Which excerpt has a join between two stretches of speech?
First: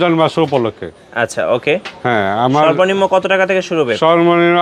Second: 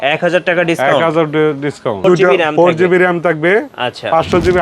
second; 1 cut; at 2.0 s

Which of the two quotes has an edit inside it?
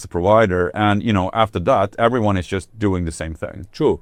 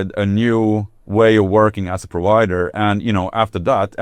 second; 1 cut; at 1.0 s

